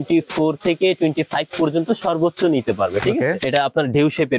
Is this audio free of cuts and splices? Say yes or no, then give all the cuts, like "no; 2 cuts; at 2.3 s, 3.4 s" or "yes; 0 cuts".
no; 1 cut; at 3.4 s